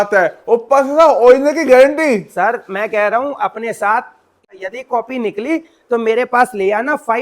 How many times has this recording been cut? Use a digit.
1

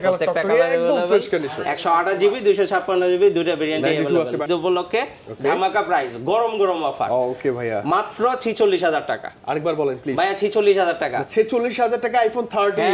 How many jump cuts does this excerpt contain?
1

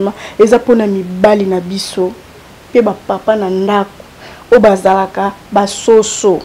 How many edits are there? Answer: 0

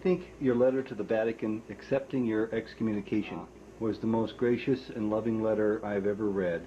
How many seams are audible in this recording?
1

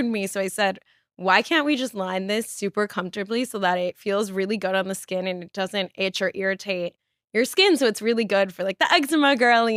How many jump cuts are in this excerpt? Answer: 0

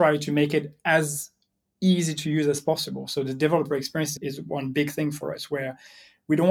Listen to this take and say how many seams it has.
1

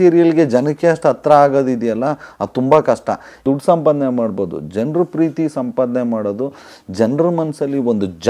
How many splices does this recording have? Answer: 1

